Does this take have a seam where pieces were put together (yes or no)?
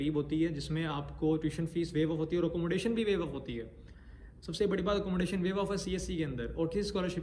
no